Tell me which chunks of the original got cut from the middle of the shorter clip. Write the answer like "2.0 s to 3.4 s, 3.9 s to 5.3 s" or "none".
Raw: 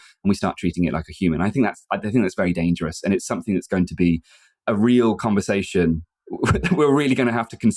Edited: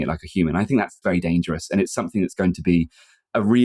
1.8 s to 2.3 s

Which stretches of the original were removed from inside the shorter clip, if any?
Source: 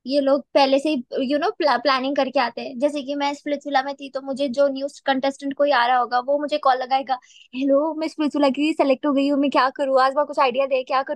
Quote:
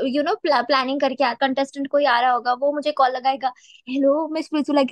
2.5 s to 5.0 s

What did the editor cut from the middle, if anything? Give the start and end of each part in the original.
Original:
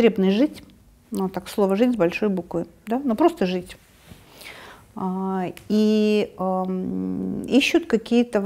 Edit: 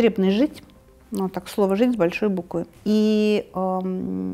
2.7 s to 5.6 s

